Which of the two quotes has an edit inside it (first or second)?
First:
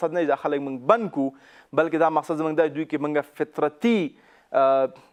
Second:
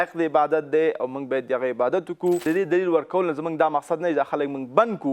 second